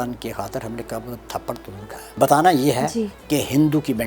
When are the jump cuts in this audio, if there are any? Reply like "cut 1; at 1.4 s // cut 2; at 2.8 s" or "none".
cut 1; at 2.1 s